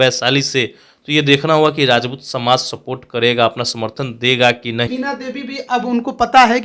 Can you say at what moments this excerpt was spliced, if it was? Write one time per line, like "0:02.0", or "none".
0:04.9

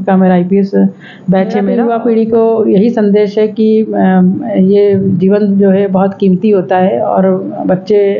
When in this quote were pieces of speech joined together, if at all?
0:01.7

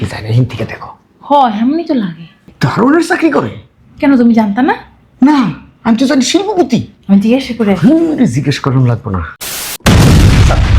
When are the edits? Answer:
0:09.6

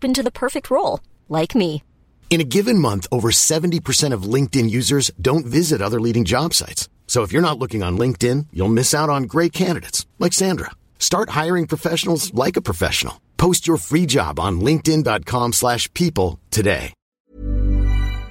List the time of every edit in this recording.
0:17.2

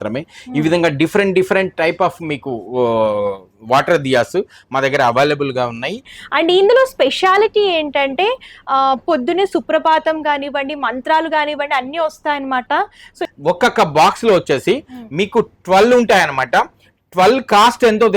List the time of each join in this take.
0:06.2
0:13.2

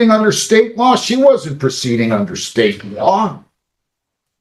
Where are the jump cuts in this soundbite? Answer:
none

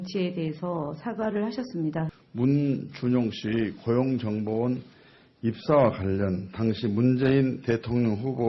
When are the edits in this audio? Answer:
0:04.0

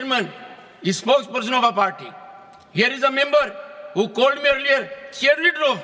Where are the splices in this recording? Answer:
none

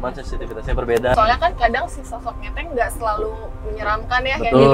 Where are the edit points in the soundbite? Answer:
0:01.1

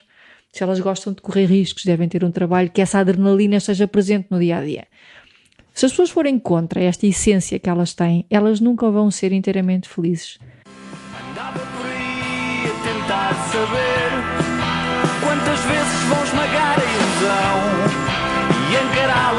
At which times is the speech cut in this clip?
0:10.9

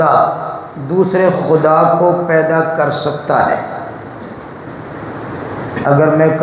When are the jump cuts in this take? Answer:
none

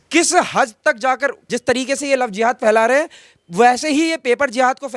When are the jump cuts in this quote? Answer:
0:01.4

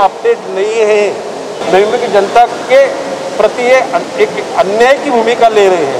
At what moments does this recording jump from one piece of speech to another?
none

